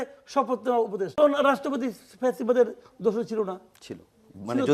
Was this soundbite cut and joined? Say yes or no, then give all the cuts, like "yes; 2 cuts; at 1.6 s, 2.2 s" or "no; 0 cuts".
yes; 1 cut; at 1.1 s